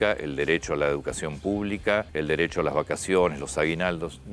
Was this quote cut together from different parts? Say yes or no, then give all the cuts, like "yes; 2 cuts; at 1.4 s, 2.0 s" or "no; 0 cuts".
yes; 1 cut; at 2.1 s